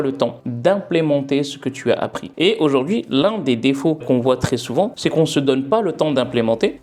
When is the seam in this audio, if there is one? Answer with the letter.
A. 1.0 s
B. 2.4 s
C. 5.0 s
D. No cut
D